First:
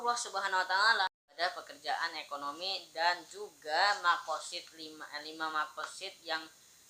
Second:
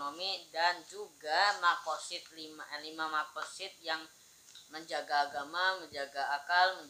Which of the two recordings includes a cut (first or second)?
first